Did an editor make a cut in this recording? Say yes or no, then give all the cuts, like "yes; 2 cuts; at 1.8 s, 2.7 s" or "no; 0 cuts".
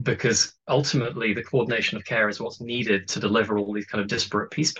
no; 0 cuts